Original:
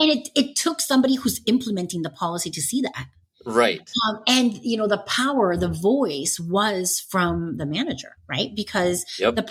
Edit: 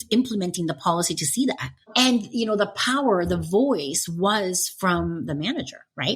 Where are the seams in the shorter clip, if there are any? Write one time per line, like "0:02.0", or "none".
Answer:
0:01.9